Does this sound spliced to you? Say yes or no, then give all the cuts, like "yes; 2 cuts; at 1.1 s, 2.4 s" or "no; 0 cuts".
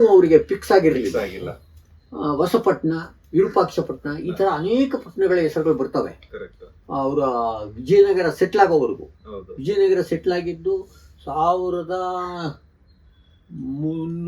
no; 0 cuts